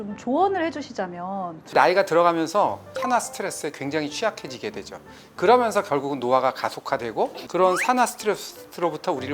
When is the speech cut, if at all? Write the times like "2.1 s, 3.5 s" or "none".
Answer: 1.7 s, 2.9 s, 7.4 s